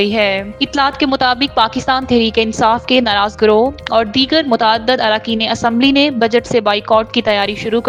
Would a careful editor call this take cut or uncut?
uncut